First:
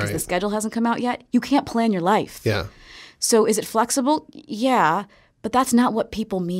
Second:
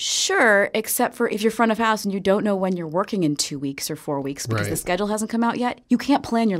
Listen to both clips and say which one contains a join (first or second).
second